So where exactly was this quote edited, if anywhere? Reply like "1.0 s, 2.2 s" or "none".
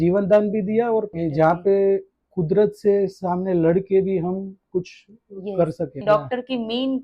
1.1 s, 6.0 s